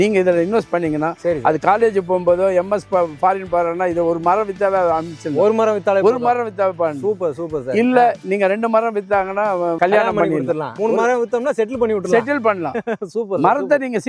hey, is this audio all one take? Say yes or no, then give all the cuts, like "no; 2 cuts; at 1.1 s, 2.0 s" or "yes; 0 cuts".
no; 2 cuts; at 9.8 s, 10.7 s